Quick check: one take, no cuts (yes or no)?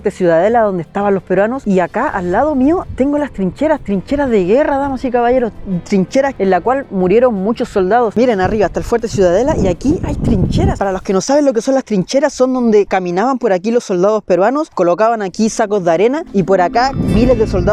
yes